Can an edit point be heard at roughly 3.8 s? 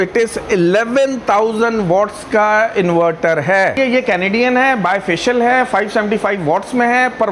yes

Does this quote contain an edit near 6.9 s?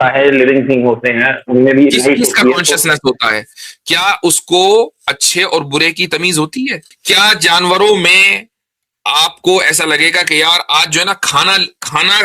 yes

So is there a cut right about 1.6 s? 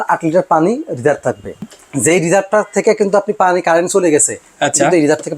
yes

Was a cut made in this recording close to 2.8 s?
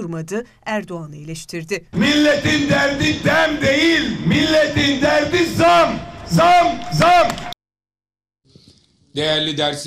no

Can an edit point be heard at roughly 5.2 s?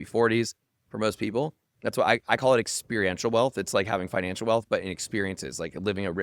no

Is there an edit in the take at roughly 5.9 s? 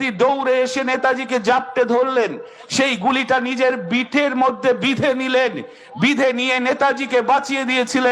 no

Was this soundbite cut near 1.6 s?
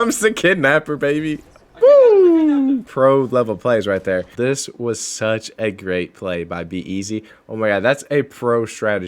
no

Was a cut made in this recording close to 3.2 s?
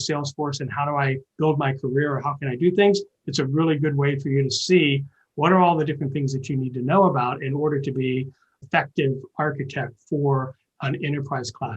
no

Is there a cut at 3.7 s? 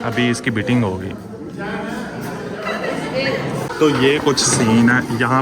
yes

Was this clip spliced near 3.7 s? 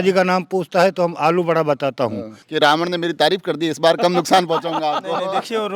no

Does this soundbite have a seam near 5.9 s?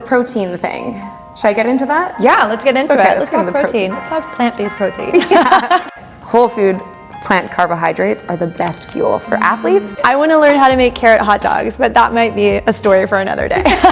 yes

